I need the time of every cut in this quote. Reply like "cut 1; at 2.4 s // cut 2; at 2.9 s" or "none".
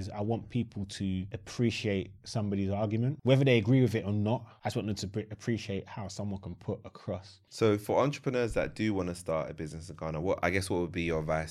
cut 1; at 1.4 s // cut 2; at 3.2 s // cut 3; at 4.5 s // cut 4; at 7.4 s